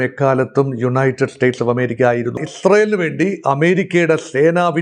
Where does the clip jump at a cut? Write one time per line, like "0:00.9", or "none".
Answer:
0:02.4